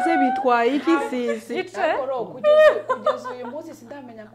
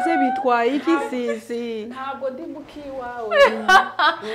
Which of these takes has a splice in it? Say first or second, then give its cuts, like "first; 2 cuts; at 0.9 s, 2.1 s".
first; 1 cut; at 1.5 s